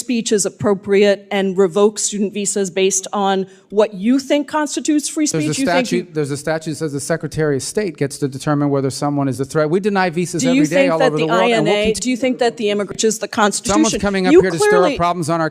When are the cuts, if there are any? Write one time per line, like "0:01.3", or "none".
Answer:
0:13.0